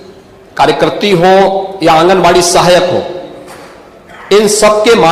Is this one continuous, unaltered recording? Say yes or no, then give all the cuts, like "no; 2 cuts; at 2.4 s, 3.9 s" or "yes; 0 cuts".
yes; 0 cuts